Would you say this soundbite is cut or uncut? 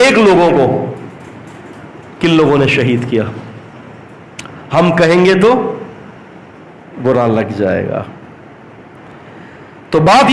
uncut